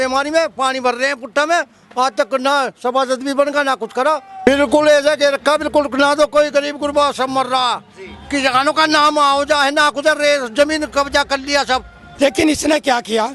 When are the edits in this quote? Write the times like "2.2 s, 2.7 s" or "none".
4.5 s, 12.0 s